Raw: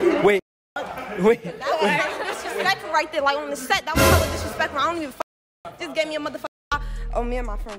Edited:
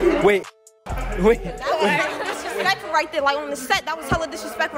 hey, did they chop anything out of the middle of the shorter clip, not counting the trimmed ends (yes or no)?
no